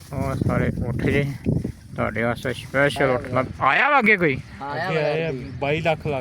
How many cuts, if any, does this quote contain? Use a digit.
1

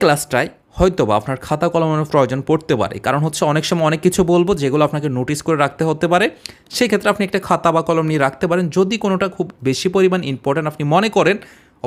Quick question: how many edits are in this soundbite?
0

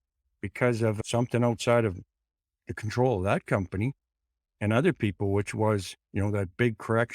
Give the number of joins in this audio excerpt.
1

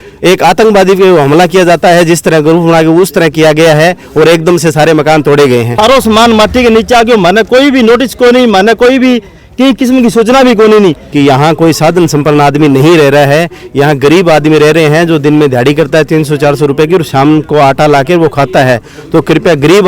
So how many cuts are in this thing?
2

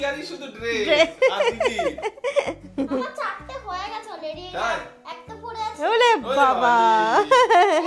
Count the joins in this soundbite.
0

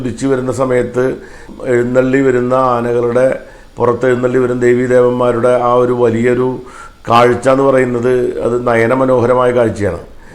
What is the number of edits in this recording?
1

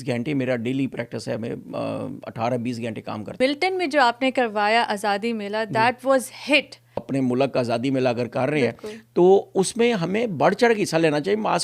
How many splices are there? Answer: 2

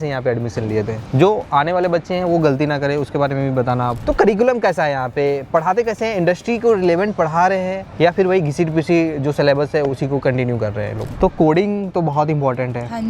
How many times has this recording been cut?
2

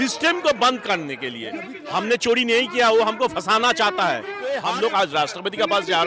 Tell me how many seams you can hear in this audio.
2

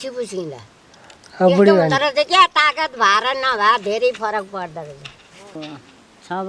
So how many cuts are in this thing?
1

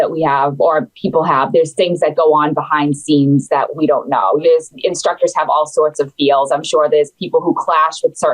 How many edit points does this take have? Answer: 1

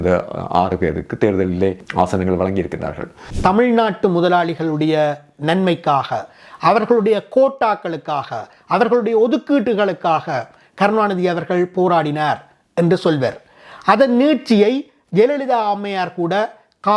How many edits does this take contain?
2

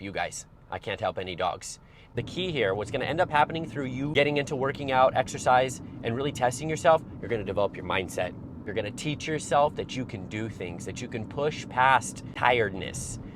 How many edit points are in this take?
4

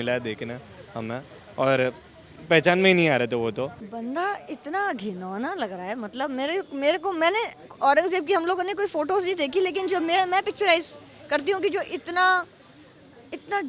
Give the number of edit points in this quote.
1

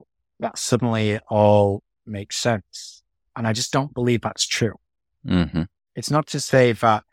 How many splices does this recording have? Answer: 0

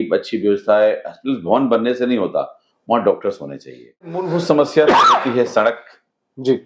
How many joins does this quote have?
1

